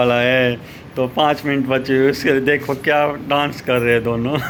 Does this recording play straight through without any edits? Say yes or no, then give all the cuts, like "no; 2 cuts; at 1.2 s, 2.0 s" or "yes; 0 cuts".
yes; 0 cuts